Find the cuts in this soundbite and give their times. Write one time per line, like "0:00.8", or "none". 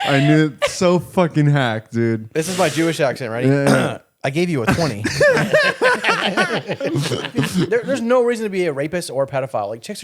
0:07.7